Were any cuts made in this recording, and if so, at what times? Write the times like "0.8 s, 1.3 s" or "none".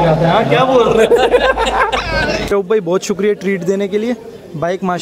2.5 s

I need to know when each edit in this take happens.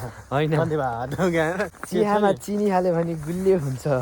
1.8 s

